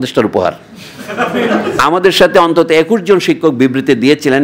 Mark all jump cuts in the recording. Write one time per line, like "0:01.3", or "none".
0:01.8